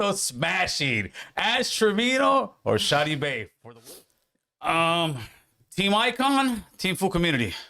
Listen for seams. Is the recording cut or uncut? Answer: cut